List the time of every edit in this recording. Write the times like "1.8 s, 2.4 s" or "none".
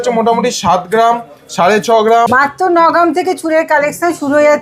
2.3 s